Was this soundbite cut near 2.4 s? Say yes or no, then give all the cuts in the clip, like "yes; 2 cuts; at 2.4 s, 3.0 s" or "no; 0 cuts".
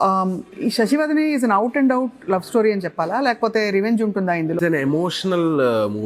no; 1 cut; at 4.6 s